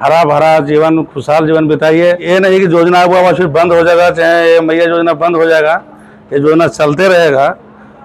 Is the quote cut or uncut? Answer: cut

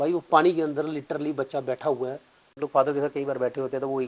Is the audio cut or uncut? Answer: cut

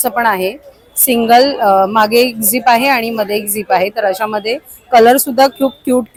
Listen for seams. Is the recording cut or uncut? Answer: uncut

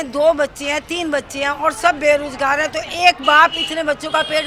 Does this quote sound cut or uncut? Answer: uncut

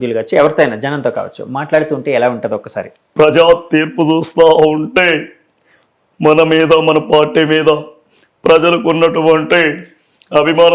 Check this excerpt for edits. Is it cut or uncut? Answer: cut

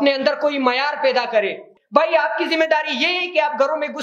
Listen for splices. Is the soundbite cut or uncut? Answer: cut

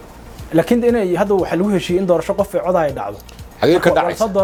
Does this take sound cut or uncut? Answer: uncut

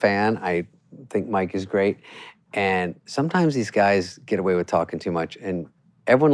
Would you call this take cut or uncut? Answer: uncut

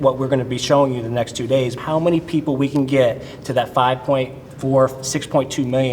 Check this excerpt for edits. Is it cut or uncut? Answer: cut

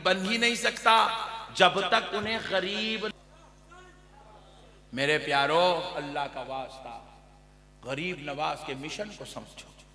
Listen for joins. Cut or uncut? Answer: cut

